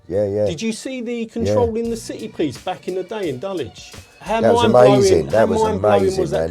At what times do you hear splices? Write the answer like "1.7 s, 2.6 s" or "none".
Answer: 4.1 s